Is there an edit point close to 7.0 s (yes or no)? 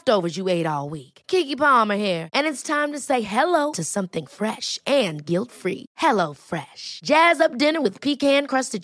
no